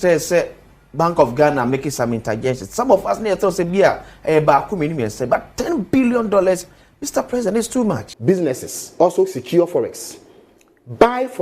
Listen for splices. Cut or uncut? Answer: cut